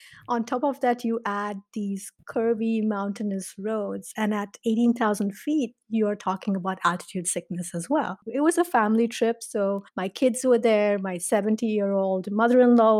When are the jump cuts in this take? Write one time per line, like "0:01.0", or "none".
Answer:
0:08.2